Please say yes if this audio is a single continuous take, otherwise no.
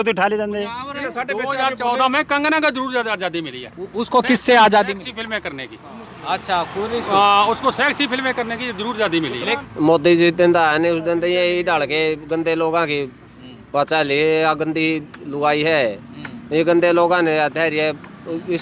no